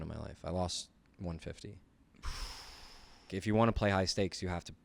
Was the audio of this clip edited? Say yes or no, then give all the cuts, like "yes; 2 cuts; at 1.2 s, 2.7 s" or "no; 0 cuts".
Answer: yes; 1 cut; at 3.3 s